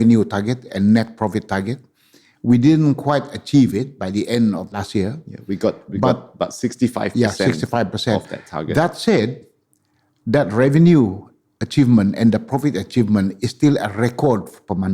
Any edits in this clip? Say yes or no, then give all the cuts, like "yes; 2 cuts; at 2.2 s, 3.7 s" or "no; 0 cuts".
yes; 1 cut; at 4.8 s